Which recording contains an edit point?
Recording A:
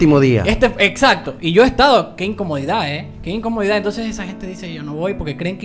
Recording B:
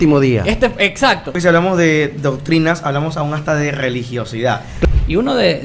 B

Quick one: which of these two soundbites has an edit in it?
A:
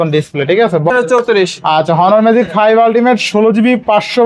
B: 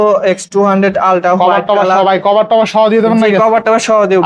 A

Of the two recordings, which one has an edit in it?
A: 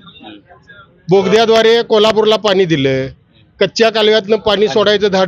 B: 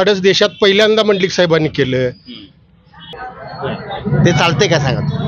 B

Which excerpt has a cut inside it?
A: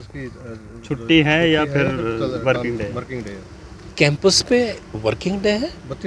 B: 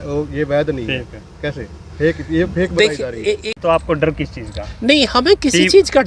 B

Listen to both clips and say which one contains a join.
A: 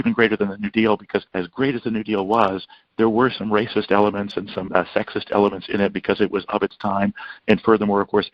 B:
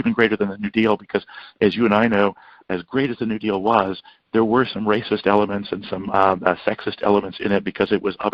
A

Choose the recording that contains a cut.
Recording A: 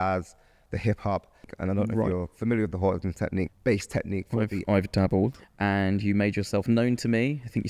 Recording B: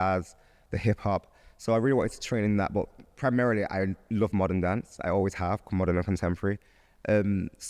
A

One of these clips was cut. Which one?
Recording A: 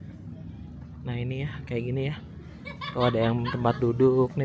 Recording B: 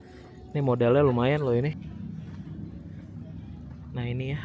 B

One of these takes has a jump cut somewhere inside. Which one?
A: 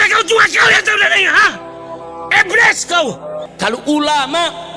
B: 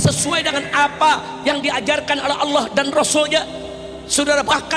A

